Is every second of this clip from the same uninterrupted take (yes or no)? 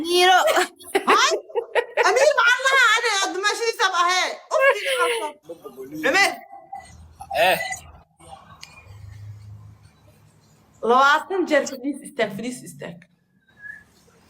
no